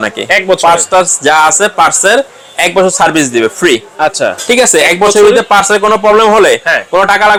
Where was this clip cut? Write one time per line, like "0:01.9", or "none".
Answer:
none

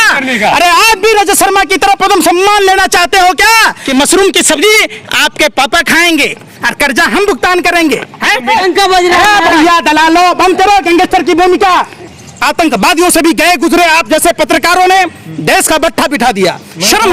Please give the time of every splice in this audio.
0:03.8
0:08.5
0:11.9

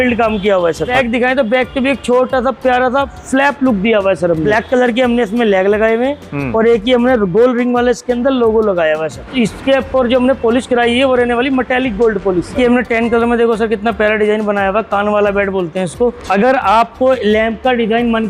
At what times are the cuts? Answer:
0:00.9
0:04.5
0:09.2
0:12.5
0:16.2

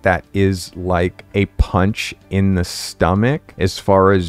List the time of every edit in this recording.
0:01.2
0:03.5

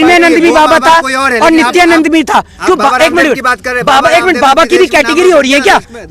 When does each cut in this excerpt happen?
none

